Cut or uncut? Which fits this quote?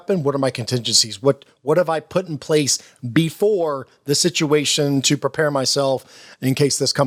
uncut